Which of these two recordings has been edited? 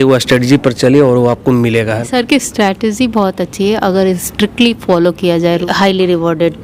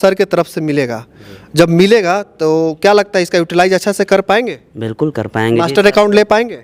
first; 2 cuts; at 2.0 s, 5.6 s

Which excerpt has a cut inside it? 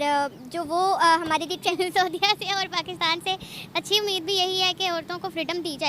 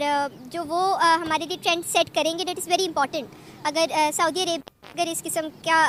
first; 1 cut; at 1.7 s

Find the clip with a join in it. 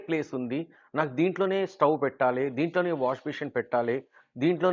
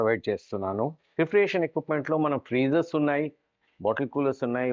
second; 1 cut; at 1.0 s

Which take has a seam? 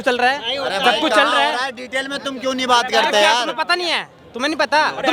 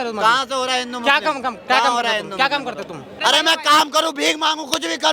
second; 1 cut; at 3.0 s

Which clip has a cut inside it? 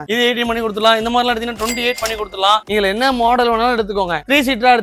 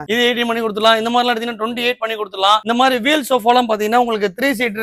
first; 1 cut; at 2.6 s

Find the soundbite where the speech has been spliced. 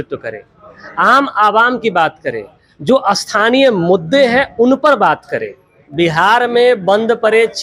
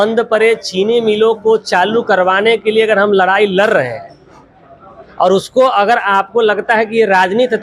first; 1 cut; at 5.8 s

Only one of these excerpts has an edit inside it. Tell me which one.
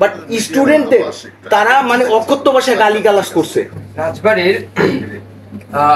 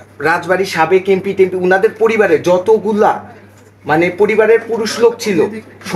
first; 1 cut; at 3.8 s

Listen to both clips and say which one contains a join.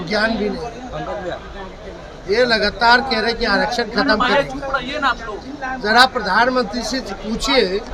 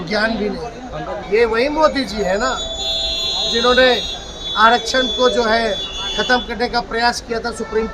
second; 1 cut; at 1.2 s

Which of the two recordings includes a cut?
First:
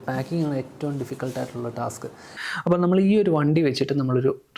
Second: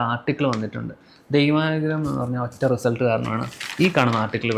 first; 1 cut; at 2.3 s

